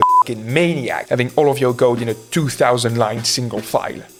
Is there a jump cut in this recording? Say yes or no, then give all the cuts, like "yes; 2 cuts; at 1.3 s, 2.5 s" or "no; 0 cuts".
no; 0 cuts